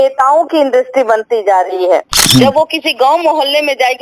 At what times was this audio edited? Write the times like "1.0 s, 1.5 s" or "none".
2.1 s